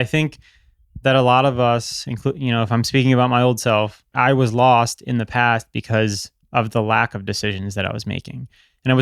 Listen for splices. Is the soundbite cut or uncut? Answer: cut